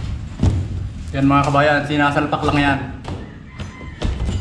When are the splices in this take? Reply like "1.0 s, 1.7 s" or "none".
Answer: none